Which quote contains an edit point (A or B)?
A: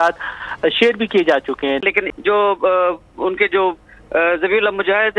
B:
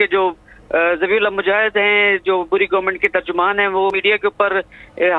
A